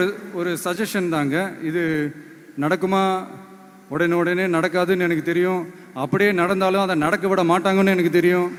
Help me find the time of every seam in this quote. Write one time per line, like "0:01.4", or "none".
none